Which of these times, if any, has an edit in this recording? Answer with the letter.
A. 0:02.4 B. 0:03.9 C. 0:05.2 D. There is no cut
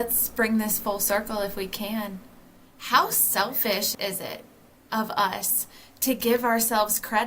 B